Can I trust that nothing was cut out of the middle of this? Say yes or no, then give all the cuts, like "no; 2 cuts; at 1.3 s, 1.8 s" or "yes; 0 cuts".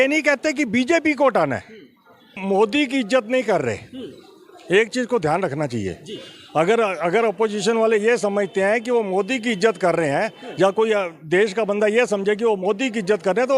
no; 1 cut; at 2.4 s